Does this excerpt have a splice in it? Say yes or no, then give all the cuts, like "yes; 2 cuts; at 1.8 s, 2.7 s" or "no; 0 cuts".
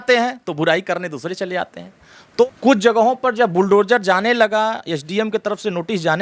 yes; 1 cut; at 2.4 s